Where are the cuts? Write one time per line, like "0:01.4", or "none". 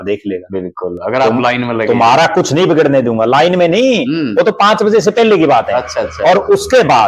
none